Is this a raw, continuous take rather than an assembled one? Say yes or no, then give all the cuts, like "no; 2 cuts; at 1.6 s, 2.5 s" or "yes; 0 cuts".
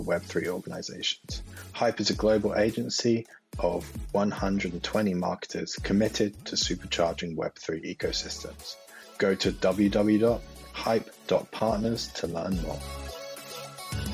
no; 1 cut; at 12.8 s